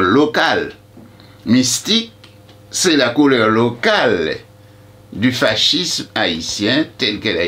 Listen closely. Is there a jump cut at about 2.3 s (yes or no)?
no